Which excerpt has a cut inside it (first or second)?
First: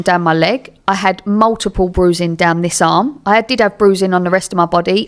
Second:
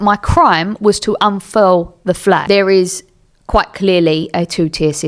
second